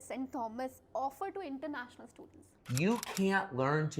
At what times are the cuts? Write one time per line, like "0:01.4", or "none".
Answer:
0:02.4

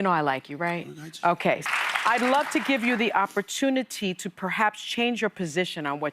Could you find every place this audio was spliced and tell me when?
0:01.6

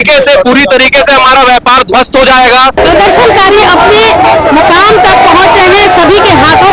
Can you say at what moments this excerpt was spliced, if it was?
0:02.8

